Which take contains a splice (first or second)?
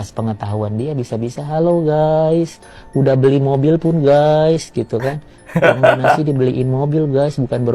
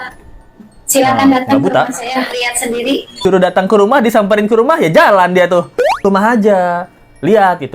second